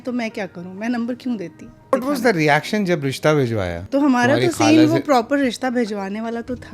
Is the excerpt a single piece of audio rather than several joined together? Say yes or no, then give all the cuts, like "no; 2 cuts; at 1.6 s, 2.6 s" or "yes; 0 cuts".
no; 2 cuts; at 1.9 s, 3.8 s